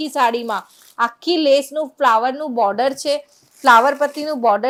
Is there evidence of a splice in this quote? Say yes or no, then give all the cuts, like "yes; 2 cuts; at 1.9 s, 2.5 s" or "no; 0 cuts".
no; 0 cuts